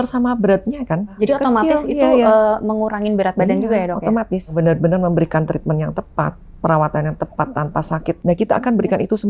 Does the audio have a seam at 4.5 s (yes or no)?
yes